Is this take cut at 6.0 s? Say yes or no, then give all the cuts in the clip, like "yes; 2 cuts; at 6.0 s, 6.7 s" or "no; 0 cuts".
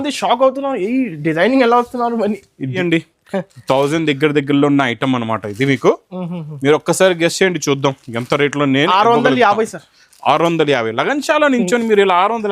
no; 1 cut; at 2.8 s